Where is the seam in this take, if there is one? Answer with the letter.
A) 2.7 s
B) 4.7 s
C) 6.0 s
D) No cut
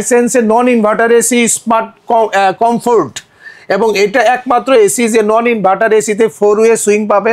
D